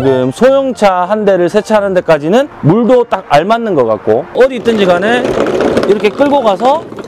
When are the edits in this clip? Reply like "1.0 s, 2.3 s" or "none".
4.3 s